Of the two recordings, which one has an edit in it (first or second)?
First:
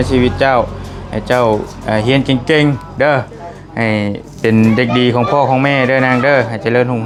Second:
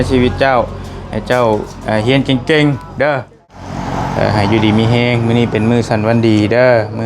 second